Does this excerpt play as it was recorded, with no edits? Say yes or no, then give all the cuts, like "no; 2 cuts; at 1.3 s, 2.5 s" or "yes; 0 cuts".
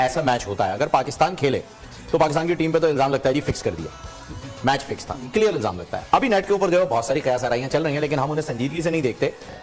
yes; 0 cuts